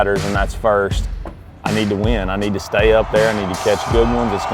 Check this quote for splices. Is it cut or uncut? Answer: cut